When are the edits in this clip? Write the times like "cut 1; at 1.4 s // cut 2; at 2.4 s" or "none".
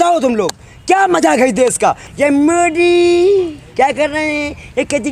cut 1; at 2.0 s